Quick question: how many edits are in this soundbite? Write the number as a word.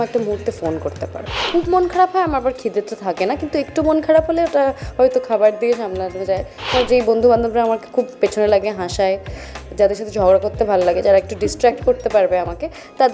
two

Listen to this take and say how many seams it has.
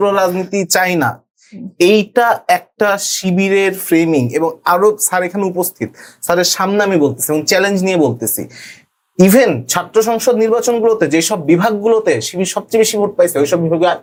zero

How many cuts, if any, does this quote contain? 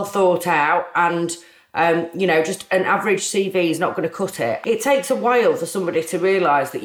one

